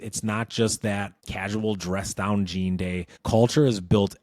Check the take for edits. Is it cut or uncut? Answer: cut